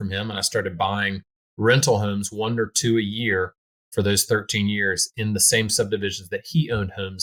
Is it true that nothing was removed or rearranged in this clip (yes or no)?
yes